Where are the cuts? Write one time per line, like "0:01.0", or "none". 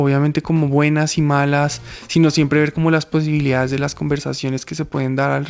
none